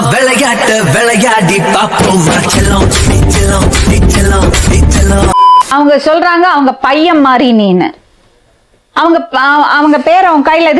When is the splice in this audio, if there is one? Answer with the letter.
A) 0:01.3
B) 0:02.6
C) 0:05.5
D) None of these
C